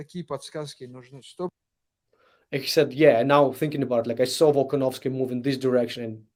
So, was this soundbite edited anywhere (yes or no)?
no